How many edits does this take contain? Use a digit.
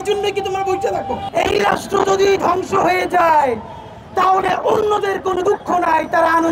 1